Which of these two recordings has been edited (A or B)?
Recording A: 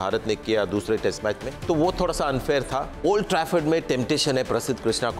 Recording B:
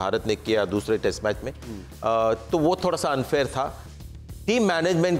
A